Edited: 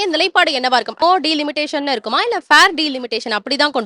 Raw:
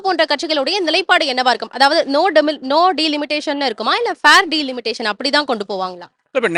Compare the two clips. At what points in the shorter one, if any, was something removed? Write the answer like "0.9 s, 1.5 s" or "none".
1.0 s